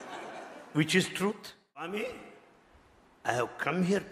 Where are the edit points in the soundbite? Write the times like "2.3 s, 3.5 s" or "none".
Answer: 1.8 s